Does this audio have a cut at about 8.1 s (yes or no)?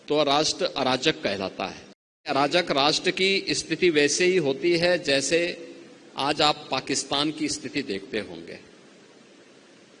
no